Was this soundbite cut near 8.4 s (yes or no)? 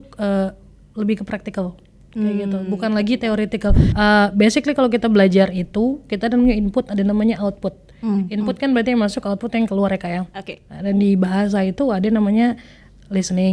no